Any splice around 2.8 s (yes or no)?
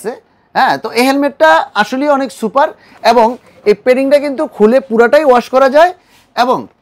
no